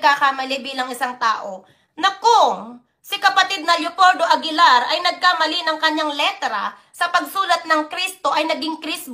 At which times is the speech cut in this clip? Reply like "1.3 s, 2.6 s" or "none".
none